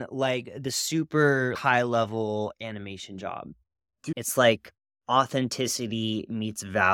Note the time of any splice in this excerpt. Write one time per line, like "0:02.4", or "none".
0:01.5
0:04.0